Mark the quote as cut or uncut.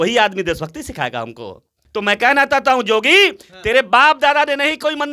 cut